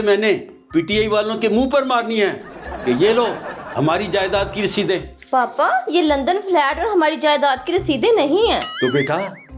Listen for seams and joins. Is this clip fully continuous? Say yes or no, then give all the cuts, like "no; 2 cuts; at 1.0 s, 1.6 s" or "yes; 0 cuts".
yes; 0 cuts